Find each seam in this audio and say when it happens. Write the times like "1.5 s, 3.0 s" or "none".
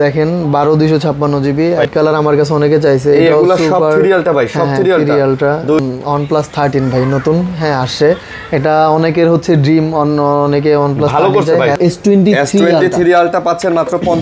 1.9 s, 5.8 s, 11.8 s